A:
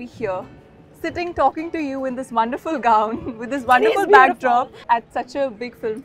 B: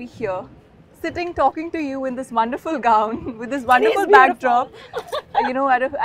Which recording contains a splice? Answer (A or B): A